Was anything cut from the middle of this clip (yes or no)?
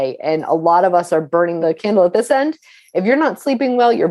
yes